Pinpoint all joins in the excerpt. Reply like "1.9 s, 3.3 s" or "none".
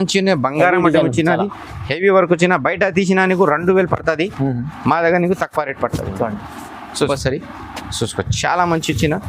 7.1 s